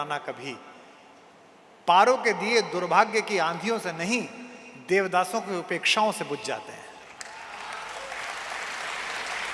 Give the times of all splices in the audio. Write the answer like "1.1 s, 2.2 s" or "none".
none